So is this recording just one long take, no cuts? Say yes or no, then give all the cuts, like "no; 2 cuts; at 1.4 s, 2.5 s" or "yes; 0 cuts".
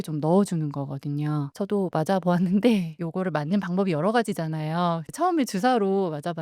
no; 1 cut; at 1.5 s